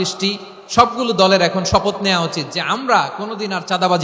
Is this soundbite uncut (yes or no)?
yes